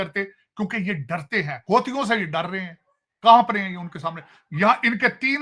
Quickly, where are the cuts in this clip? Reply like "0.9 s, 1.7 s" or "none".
none